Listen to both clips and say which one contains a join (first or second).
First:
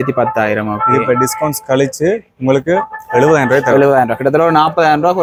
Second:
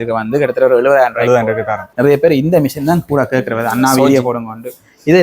second